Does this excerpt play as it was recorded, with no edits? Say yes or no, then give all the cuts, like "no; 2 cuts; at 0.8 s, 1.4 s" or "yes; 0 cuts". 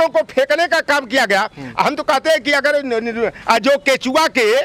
yes; 0 cuts